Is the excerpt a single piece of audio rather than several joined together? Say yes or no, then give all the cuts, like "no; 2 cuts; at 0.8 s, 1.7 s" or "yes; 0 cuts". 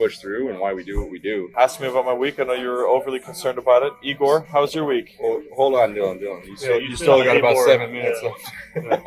no; 1 cut; at 1.5 s